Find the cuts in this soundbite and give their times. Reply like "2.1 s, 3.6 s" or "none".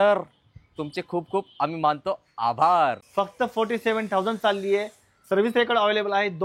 3.0 s

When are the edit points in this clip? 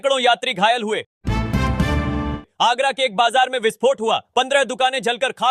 1.1 s, 2.4 s

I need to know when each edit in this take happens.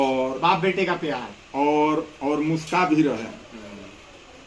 none

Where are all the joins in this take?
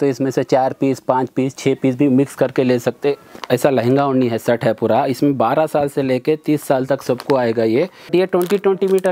3.3 s, 8.1 s

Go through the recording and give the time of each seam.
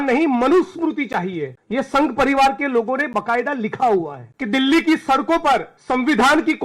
1.5 s, 4.2 s, 5.7 s

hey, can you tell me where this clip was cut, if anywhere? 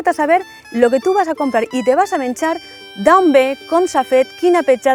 none

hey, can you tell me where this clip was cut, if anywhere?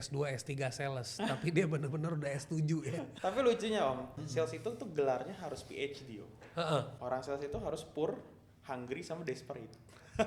3.1 s, 4.2 s, 7.0 s

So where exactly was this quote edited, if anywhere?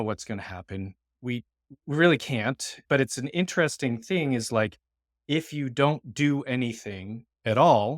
2.8 s

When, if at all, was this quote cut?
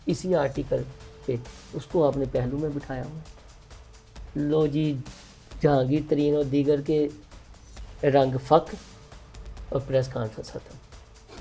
none

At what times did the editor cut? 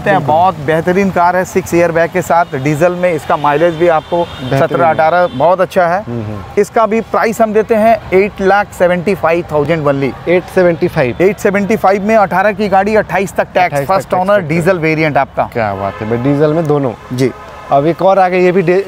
none

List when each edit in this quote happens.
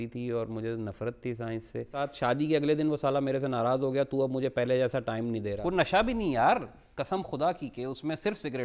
2.1 s, 5.6 s

